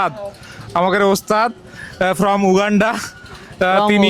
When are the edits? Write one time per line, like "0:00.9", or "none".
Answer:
none